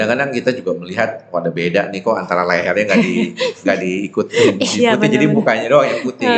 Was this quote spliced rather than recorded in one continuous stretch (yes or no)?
no